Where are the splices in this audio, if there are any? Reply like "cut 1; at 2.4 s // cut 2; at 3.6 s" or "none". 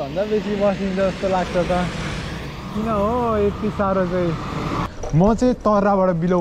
cut 1; at 4.9 s